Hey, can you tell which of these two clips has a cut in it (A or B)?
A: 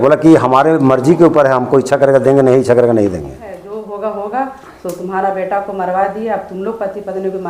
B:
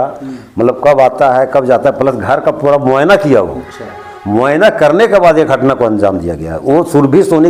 A